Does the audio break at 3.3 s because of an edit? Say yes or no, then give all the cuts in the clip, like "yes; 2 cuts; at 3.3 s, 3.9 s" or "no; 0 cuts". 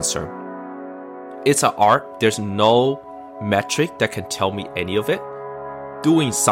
no; 2 cuts; at 0.8 s, 5.5 s